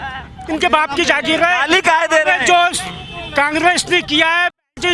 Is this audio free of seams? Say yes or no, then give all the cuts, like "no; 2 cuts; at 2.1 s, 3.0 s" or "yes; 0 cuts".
yes; 0 cuts